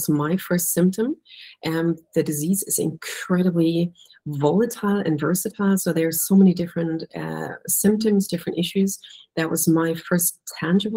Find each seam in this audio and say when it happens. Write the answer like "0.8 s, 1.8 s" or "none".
none